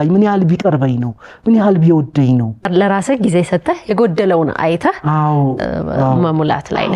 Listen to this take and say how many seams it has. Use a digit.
1